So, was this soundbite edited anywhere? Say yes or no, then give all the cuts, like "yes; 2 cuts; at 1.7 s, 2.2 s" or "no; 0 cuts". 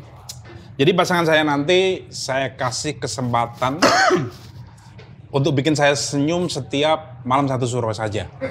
no; 0 cuts